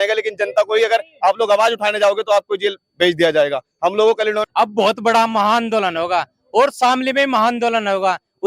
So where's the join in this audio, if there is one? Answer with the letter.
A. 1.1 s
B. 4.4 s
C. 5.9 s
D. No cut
B